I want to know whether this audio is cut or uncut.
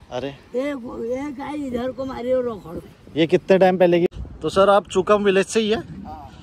cut